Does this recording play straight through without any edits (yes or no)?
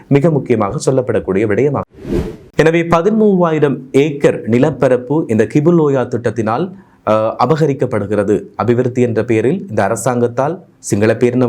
no